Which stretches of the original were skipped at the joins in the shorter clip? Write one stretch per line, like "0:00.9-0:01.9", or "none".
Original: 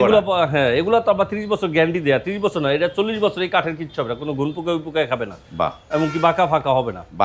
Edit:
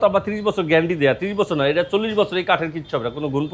none